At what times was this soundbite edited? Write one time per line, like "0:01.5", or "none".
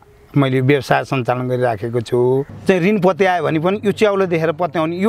0:02.5